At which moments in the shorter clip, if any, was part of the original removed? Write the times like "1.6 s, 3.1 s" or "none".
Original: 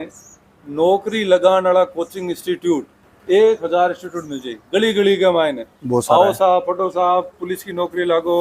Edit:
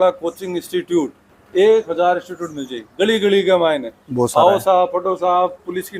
none